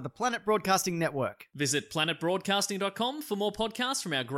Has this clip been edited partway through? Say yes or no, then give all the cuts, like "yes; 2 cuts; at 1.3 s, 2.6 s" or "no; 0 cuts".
no; 0 cuts